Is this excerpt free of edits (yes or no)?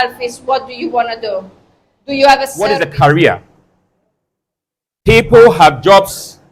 no